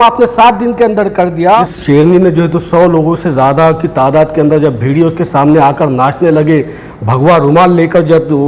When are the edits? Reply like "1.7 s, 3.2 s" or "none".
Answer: 1.7 s